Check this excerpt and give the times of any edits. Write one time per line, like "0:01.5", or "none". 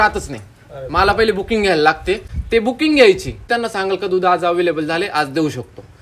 0:02.3
0:03.5